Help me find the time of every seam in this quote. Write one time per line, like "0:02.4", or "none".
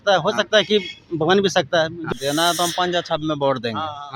0:02.0